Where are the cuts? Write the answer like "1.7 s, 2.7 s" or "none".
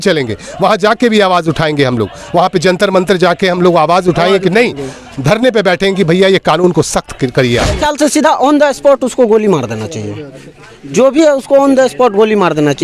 7.8 s